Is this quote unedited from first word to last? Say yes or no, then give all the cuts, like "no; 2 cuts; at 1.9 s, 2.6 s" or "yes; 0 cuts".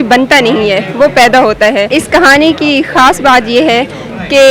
no; 1 cut; at 1.9 s